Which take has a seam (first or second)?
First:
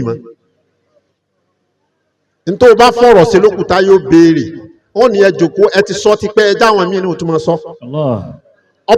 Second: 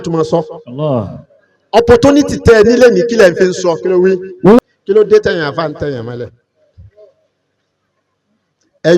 second